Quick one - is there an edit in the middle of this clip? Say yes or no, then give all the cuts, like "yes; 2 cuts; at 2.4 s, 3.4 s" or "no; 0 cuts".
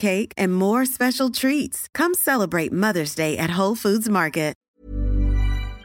yes; 1 cut; at 4.6 s